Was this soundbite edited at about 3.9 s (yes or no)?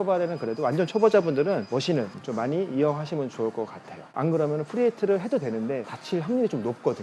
yes